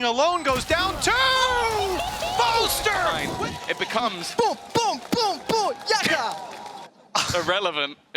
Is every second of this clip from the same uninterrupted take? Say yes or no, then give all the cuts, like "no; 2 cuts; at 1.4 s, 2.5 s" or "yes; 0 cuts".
no; 1 cut; at 3.2 s